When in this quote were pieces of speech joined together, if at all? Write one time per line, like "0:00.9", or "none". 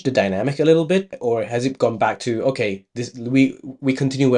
0:01.1